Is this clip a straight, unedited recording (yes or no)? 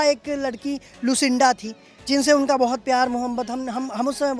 yes